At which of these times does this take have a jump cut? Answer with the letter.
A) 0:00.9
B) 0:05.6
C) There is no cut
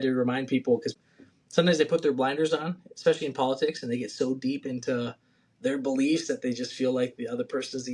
A